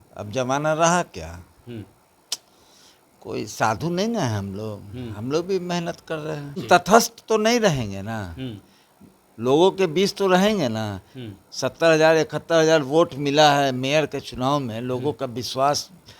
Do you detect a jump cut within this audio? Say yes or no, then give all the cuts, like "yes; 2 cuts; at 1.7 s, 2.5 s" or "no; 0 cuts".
yes; 1 cut; at 6.6 s